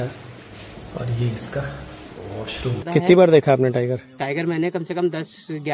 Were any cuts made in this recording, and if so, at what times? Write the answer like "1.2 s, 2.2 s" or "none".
2.8 s